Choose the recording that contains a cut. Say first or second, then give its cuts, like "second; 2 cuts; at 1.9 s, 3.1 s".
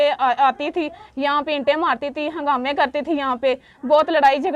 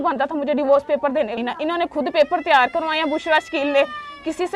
second; 1 cut; at 1.3 s